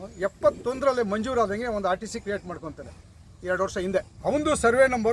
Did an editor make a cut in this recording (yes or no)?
yes